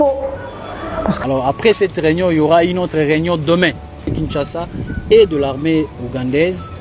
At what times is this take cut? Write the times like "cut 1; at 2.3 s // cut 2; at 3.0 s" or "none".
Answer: cut 1; at 1.2 s // cut 2; at 4.2 s